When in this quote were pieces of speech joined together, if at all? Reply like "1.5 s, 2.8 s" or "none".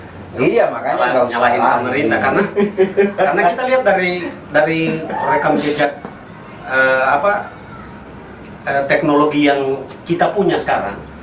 none